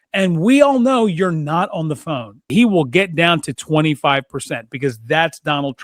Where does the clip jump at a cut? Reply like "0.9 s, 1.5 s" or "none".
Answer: 2.5 s